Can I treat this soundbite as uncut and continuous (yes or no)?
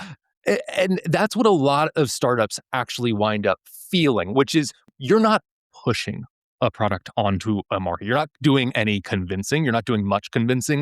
no